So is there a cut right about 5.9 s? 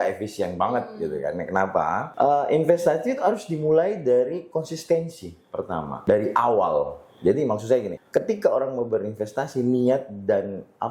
yes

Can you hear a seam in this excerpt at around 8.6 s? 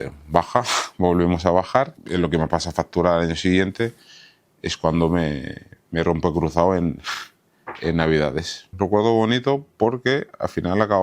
yes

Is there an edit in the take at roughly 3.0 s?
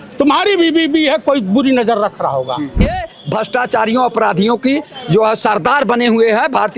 yes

